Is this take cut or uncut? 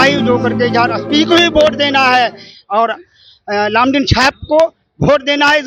uncut